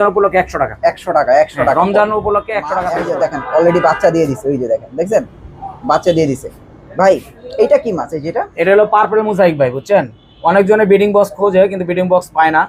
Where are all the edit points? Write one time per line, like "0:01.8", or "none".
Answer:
0:03.0